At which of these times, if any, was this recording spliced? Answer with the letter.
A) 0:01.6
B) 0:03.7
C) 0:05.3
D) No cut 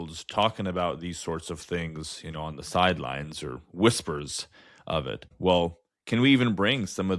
C